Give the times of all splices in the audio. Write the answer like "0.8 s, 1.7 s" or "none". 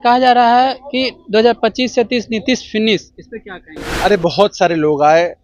none